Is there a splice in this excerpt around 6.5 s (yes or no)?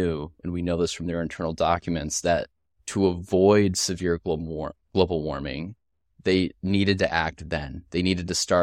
no